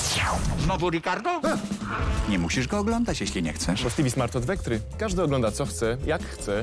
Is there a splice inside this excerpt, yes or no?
no